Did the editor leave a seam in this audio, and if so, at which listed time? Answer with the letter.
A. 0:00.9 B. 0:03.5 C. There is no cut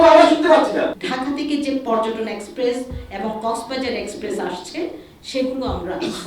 A